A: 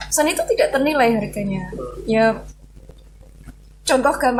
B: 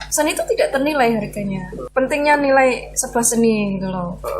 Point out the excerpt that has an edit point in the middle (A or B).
B